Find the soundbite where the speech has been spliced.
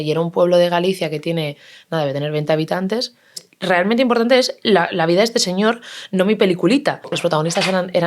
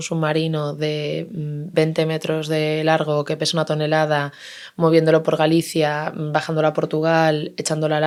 first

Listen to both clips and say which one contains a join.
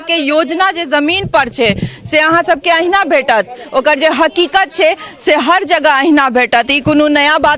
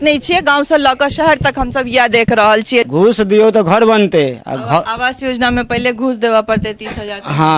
second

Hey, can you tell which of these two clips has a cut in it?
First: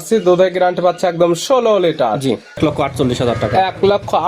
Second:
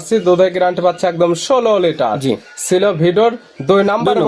first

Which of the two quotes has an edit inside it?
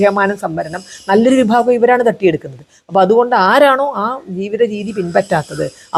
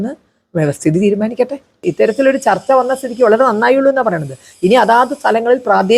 second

